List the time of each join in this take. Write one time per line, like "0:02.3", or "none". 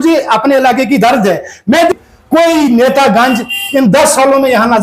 0:01.9